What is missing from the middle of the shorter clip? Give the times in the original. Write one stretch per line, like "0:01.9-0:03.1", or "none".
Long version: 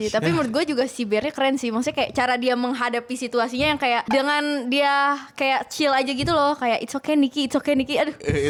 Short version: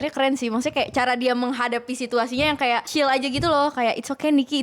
0:04.0-0:05.7